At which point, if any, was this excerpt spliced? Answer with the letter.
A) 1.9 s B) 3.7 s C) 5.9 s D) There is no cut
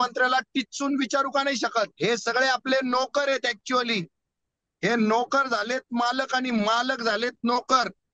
A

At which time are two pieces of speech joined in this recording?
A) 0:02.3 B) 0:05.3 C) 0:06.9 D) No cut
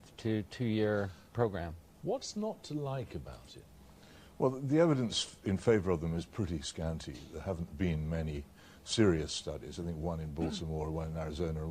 A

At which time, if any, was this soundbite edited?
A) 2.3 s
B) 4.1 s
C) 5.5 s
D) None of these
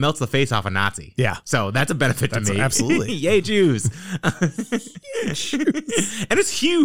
D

